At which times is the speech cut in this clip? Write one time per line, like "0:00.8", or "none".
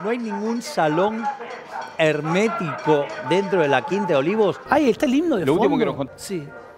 0:04.6
0:06.0